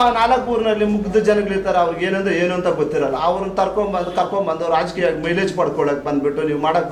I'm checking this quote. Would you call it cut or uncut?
uncut